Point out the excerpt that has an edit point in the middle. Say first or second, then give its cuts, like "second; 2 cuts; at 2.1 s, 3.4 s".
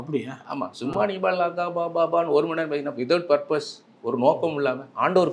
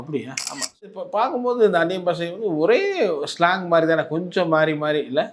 second; 1 cut; at 0.9 s